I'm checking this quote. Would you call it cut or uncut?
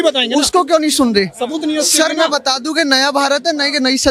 uncut